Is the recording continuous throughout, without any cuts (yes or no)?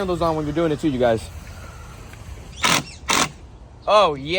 no